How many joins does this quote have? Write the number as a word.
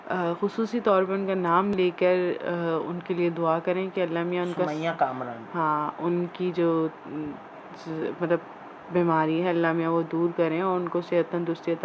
zero